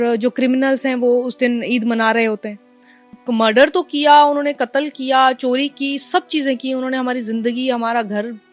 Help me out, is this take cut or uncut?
cut